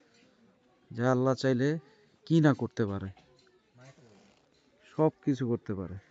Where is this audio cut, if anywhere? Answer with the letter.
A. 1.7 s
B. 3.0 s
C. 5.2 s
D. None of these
D